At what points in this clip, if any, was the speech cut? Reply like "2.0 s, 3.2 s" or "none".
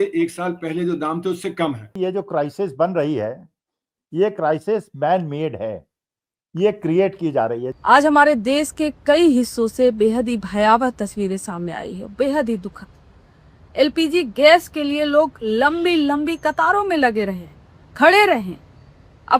1.9 s, 7.7 s